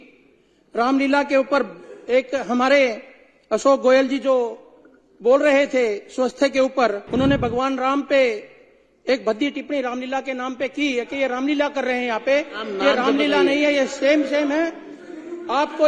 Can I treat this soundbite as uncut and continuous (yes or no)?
no